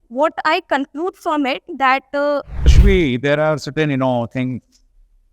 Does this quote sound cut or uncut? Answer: cut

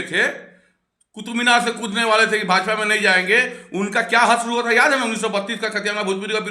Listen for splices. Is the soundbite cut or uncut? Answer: uncut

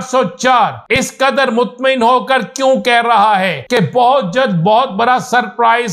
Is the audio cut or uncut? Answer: cut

